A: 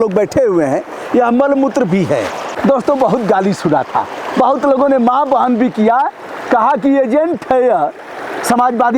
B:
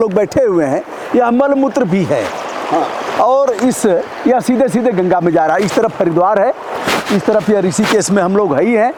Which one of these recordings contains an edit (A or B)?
A